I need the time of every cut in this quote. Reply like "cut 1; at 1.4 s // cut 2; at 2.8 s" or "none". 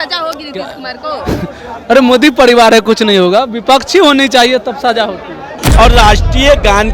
cut 1; at 5.5 s

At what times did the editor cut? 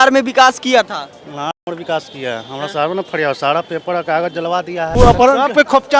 cut 1; at 4.9 s

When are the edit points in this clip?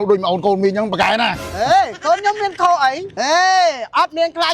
cut 1; at 3.0 s

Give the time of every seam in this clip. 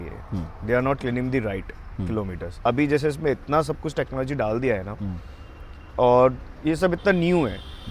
cut 1; at 2.5 s

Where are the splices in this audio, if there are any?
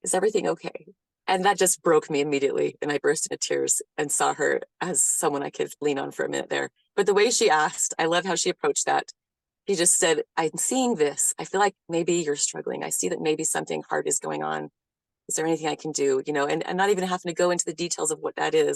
none

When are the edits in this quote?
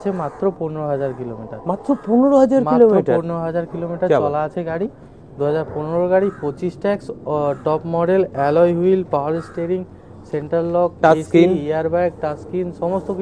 none

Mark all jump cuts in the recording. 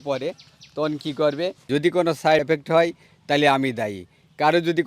cut 1; at 1.6 s

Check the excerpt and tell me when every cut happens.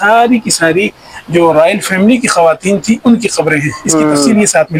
none

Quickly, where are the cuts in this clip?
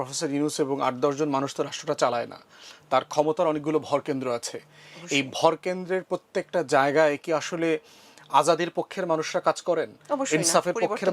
none

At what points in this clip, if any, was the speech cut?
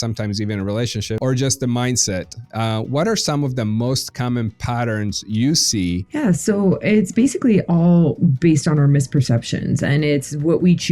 cut 1; at 1.2 s // cut 2; at 6.0 s

